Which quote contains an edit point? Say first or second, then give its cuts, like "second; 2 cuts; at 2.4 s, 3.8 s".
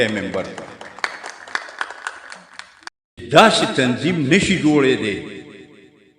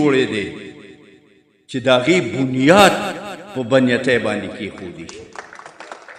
first; 1 cut; at 3.2 s